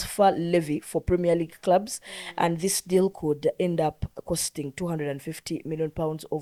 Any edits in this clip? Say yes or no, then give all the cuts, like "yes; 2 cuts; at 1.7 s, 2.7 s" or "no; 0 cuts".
no; 0 cuts